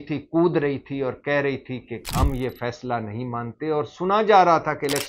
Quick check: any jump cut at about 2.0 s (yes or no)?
yes